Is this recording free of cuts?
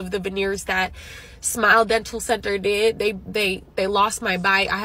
yes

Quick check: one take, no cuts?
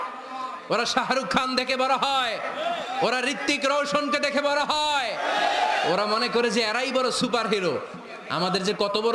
yes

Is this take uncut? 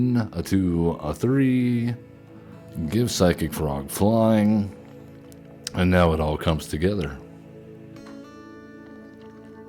yes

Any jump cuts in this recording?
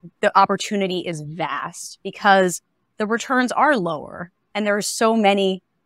no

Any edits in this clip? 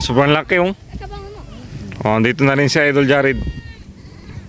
no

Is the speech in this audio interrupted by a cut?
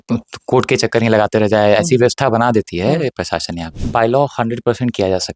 yes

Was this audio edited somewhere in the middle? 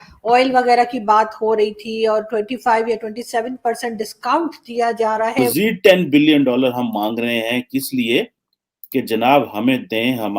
yes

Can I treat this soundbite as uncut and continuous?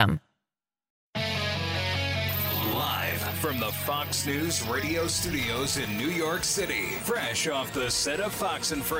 no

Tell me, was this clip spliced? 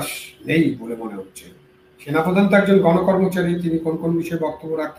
no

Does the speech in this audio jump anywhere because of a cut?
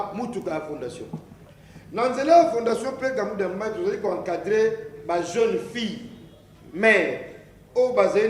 no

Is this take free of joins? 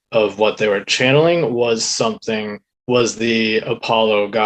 yes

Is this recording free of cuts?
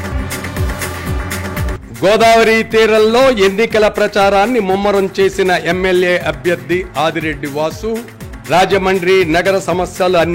yes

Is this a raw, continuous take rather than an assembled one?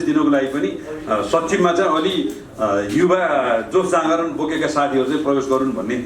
yes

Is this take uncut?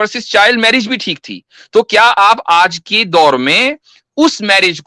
yes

